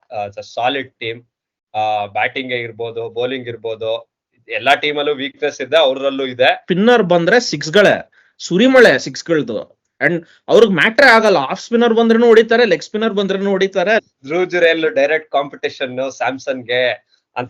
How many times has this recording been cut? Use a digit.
2